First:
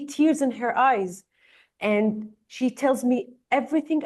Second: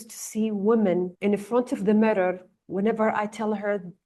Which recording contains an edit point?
second; 1 cut; at 1.1 s

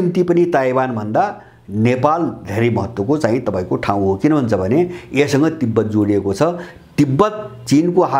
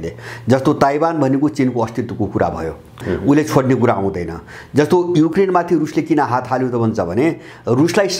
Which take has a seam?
second; 2 cuts; at 3.0 s, 5.3 s

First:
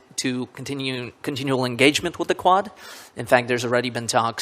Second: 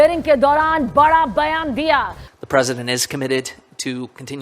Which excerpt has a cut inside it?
second; 1 cut; at 2.2 s

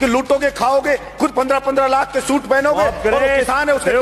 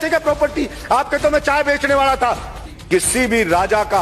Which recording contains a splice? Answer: second; 1 cut; at 2.7 s

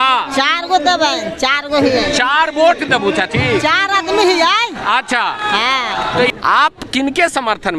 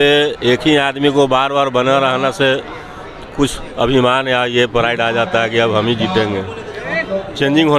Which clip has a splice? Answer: first; 1 cut; at 6.2 s

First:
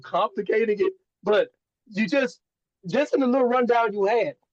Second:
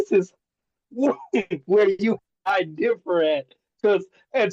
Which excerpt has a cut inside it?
second; 1 cut; at 2.3 s

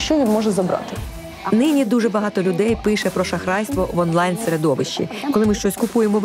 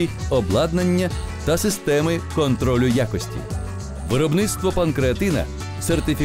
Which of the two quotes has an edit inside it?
first; 2 cuts; at 1.1 s, 5.1 s

